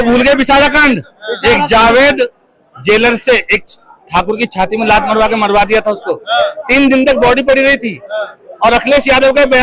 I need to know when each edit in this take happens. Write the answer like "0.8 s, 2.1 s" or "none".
none